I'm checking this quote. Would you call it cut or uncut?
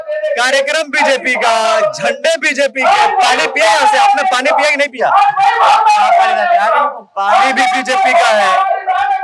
uncut